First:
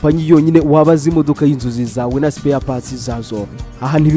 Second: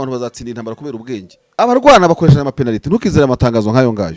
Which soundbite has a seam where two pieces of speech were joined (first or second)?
second